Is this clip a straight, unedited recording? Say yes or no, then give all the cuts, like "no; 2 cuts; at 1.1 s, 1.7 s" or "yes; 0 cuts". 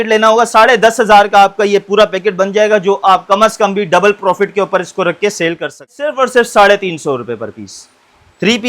no; 1 cut; at 6.0 s